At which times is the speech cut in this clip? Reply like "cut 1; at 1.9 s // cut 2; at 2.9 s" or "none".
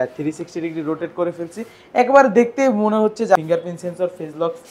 cut 1; at 3.4 s